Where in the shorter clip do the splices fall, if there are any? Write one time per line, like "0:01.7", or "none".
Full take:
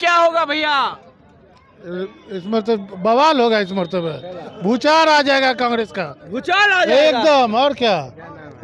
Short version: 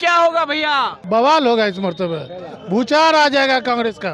0:01.0